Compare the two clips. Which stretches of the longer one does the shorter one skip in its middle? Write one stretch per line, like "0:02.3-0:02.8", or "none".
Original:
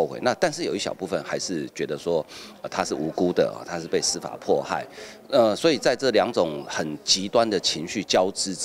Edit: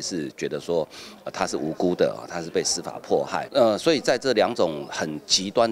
0:04.8-0:05.2